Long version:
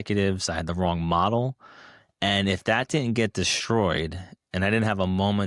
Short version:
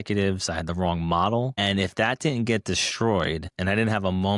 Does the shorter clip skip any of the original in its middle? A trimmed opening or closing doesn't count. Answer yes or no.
yes